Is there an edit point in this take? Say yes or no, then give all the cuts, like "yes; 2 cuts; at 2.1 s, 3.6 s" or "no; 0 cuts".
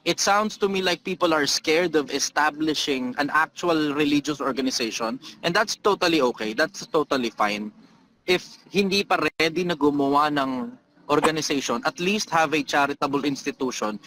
no; 0 cuts